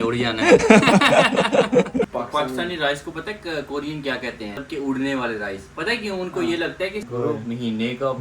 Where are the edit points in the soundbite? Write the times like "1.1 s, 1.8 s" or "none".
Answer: 2.1 s, 4.6 s, 7.1 s